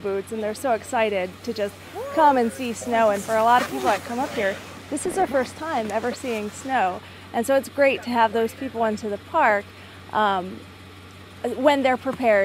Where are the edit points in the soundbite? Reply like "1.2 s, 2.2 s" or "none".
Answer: 8.5 s